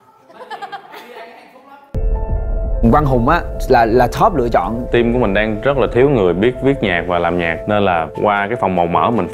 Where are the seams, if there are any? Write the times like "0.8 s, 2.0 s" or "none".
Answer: 1.9 s